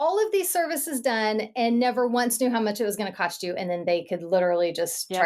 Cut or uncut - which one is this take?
uncut